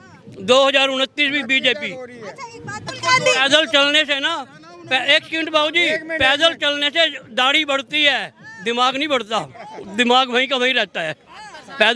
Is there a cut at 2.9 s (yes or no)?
yes